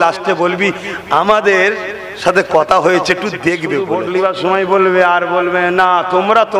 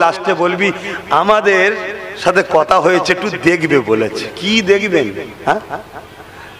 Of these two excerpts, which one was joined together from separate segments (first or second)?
first